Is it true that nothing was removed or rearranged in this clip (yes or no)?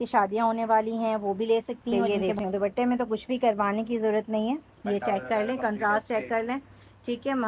no